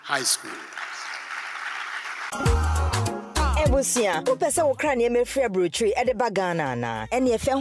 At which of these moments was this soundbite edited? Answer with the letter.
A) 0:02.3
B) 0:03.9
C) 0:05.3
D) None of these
A